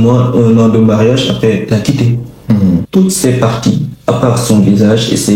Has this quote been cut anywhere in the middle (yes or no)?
yes